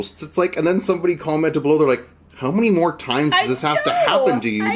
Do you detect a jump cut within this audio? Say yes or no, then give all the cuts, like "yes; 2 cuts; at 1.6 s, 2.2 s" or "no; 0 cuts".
no; 0 cuts